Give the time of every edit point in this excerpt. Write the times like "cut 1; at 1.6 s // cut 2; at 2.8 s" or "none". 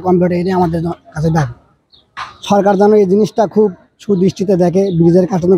none